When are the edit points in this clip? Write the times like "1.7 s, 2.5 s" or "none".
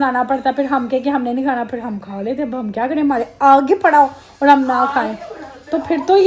none